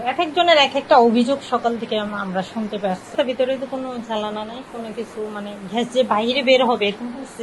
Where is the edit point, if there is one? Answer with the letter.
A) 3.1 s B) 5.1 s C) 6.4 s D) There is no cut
A